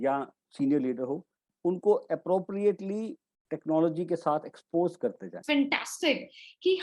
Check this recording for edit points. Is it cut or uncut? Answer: cut